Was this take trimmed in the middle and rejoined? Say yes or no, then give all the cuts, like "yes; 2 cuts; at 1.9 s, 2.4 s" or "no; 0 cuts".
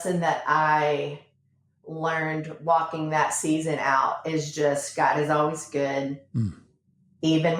no; 0 cuts